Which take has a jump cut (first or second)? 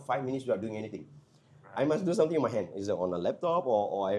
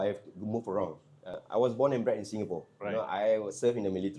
second